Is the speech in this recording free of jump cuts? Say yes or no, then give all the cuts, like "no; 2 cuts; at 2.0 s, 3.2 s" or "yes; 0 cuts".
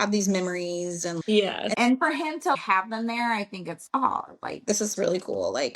no; 1 cut; at 1.7 s